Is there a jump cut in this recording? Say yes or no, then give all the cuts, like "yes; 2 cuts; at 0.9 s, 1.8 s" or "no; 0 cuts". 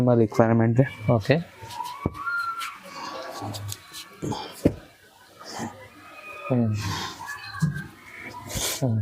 no; 0 cuts